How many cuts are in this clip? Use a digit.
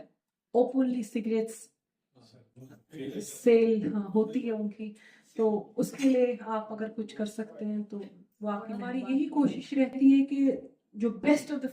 1